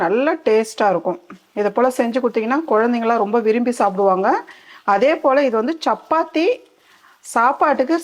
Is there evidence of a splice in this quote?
no; 0 cuts

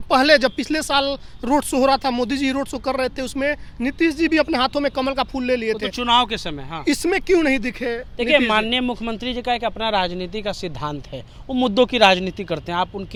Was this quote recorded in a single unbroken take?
yes; 0 cuts

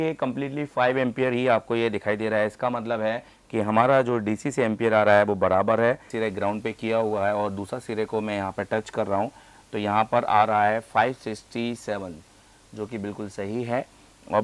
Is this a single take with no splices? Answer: no; 1 cut; at 6.1 s

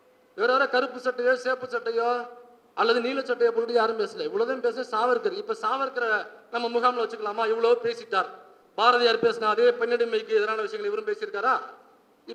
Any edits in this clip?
no; 0 cuts

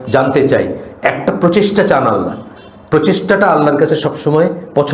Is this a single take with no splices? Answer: yes; 0 cuts

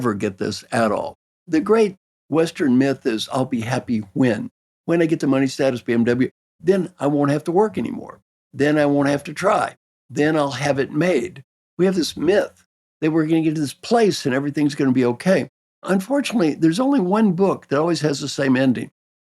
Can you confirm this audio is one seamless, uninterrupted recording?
no; 1 cut; at 1.3 s

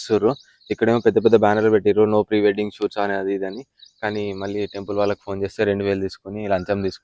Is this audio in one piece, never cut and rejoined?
yes; 0 cuts

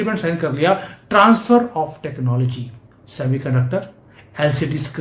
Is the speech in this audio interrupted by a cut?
no; 0 cuts

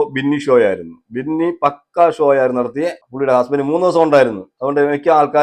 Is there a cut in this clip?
yes; 1 cut; at 3.0 s

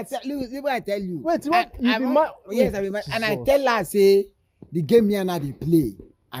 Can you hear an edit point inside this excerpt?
no; 0 cuts

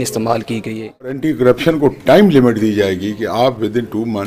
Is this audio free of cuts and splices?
no; 1 cut; at 1.2 s

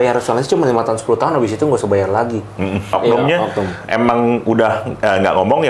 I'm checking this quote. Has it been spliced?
yes; 1 cut; at 2.9 s

